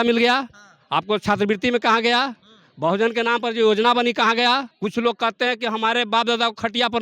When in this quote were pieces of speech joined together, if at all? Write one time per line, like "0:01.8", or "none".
0:04.7